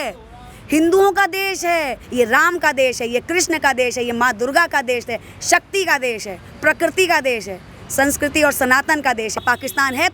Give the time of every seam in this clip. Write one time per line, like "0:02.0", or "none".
0:02.0
0:09.4

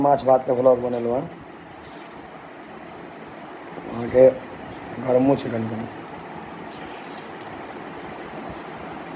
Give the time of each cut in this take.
none

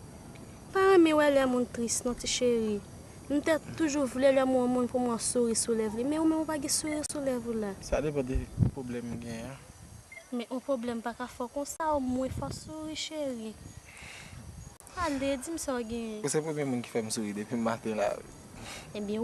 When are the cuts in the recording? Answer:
none

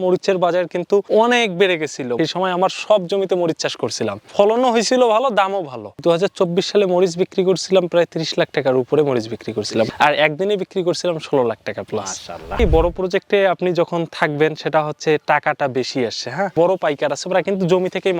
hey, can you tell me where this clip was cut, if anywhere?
0:12.6
0:16.5

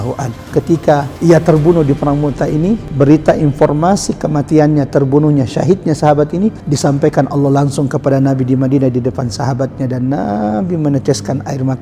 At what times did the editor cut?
0:01.1
0:02.9
0:06.6

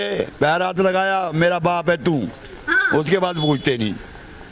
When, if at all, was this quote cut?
none

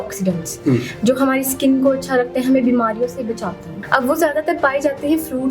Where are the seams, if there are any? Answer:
0:03.7

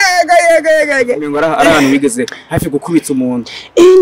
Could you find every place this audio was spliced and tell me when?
0:01.2

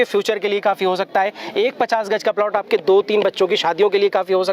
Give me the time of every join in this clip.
none

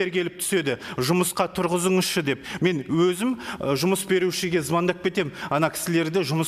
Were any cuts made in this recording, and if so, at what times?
none

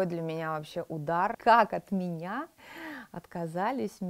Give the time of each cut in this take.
0:01.4

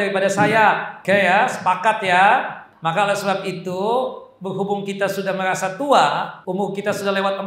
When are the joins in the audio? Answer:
0:00.9
0:02.6
0:06.4

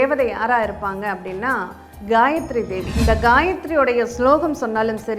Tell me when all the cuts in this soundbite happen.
0:02.9

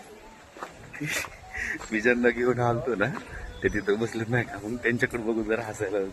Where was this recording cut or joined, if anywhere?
none

